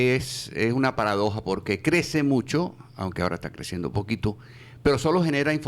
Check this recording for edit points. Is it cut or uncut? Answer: uncut